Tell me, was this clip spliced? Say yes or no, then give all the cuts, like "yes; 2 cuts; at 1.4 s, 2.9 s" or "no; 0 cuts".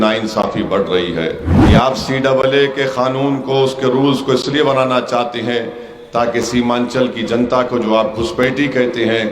yes; 1 cut; at 1.5 s